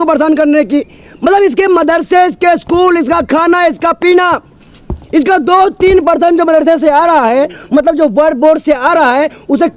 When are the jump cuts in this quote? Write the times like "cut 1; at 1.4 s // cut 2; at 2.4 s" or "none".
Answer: none